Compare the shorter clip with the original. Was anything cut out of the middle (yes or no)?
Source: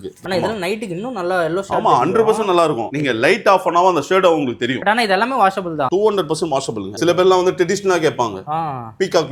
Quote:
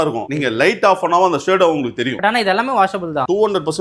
no